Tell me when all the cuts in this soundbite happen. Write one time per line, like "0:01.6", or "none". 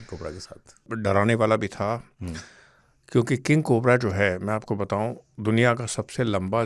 0:00.9